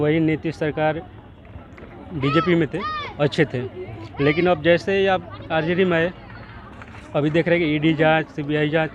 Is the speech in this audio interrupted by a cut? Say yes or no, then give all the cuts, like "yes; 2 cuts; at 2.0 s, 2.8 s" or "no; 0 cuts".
no; 0 cuts